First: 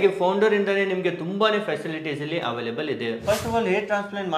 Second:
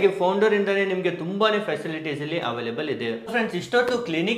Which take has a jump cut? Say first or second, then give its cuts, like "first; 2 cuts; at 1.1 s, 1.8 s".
first; 1 cut; at 3.2 s